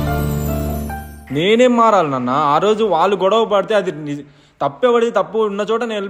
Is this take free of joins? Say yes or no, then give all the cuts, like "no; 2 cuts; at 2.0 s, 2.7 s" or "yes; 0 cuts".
yes; 0 cuts